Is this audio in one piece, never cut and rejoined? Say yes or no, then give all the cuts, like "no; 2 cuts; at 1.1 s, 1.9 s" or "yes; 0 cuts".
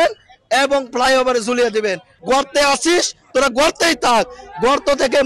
no; 1 cut; at 2.1 s